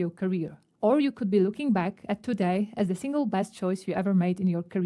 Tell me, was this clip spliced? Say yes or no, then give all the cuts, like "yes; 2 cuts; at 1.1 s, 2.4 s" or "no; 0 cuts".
yes; 1 cut; at 3.9 s